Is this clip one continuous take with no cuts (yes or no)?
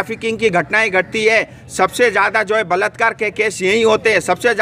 yes